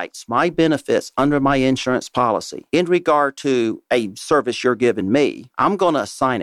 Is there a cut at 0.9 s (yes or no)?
no